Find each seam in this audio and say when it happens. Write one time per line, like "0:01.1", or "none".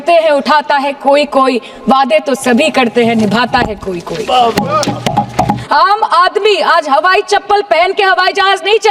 0:05.6